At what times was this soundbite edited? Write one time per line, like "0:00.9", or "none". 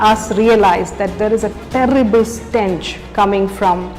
none